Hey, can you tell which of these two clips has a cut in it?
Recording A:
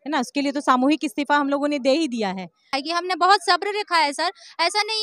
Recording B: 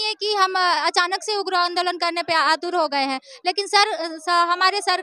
A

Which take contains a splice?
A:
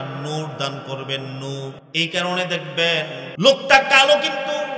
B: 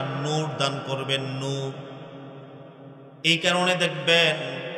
A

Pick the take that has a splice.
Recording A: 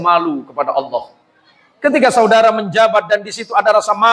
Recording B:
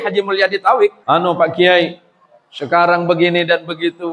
B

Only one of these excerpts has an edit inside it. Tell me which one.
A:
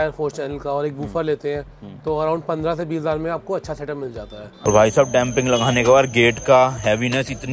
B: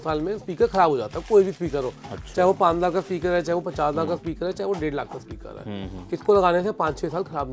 A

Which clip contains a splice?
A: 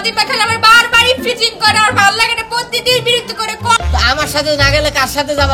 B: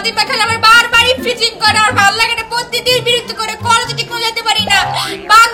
A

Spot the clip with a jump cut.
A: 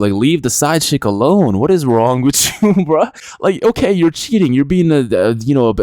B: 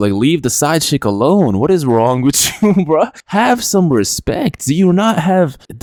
A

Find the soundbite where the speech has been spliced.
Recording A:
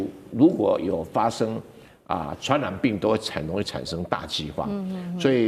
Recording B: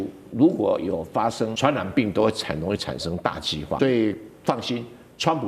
B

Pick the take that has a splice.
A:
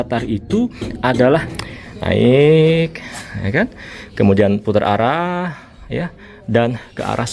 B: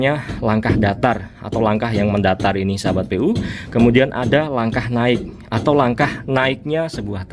A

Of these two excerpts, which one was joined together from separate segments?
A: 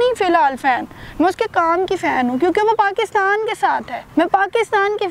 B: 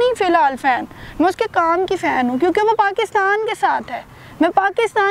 A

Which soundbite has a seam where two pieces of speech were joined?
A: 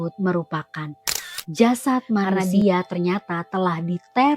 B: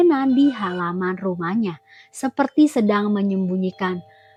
A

